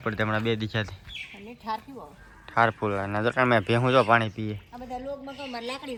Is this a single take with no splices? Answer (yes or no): yes